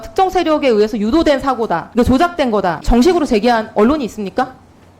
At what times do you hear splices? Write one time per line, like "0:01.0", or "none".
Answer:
0:01.8
0:02.8